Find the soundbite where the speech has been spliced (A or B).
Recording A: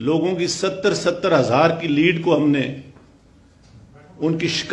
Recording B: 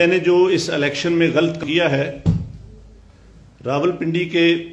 B